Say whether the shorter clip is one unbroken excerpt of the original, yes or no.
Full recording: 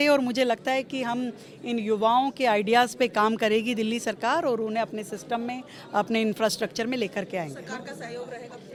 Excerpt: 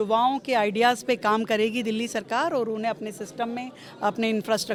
yes